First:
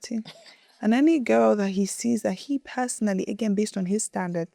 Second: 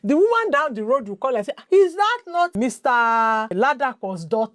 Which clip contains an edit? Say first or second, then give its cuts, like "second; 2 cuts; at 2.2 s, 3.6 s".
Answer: second; 3 cuts; at 1.5 s, 2.5 s, 3.5 s